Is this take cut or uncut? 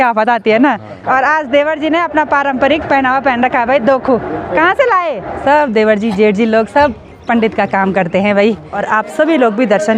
cut